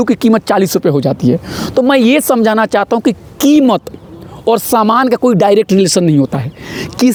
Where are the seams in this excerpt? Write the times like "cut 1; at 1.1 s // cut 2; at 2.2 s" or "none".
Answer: none

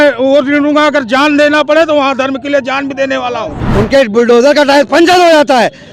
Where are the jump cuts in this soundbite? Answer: cut 1; at 3.6 s

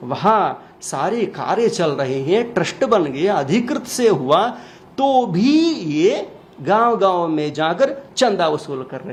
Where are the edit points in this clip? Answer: none

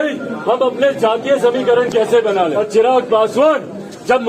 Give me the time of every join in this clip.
cut 1; at 2.6 s

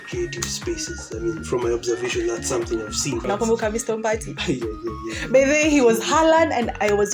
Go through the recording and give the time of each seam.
cut 1; at 3.2 s

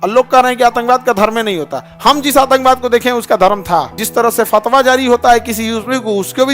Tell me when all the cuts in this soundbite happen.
cut 1; at 4.0 s

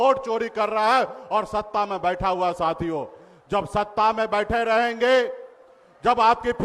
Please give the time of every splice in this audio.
none

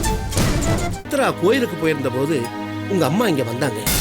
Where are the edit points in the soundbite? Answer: cut 1; at 1.0 s

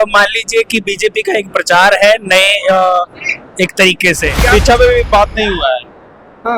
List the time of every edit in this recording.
cut 1; at 4.4 s

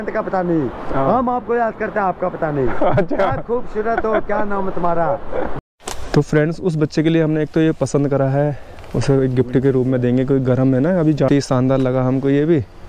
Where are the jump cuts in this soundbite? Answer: cut 1; at 5.5 s // cut 2; at 11.3 s

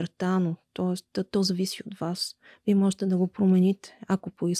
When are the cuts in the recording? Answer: none

